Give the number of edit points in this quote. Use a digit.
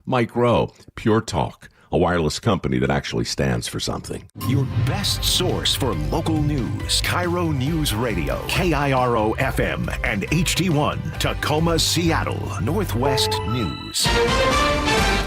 2